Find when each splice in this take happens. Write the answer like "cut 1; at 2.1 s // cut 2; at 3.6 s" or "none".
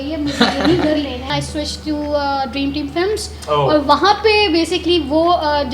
cut 1; at 1.3 s